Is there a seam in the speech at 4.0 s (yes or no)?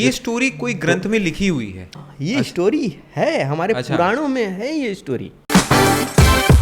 no